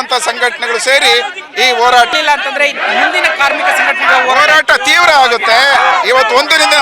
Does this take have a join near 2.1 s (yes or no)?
yes